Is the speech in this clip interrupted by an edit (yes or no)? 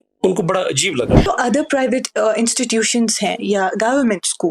yes